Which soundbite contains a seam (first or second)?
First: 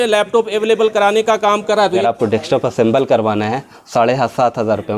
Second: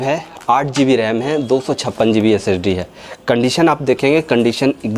first